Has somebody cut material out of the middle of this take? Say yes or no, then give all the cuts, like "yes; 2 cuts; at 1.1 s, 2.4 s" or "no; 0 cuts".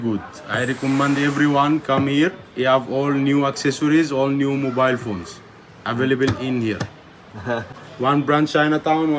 no; 0 cuts